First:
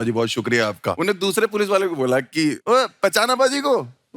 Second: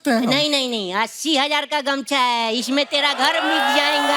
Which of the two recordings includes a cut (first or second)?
first